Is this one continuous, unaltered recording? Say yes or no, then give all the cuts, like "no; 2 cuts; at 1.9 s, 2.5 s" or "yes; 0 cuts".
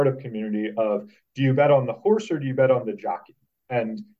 yes; 0 cuts